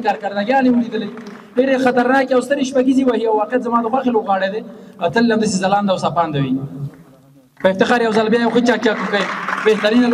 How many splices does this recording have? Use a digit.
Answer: 0